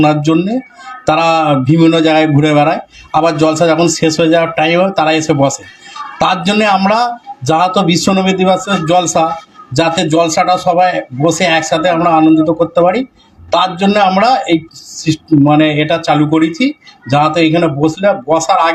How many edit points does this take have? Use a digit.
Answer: 0